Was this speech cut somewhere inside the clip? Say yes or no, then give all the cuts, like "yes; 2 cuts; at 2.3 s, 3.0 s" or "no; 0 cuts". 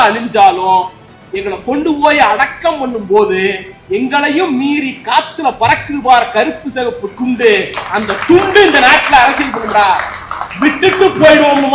no; 0 cuts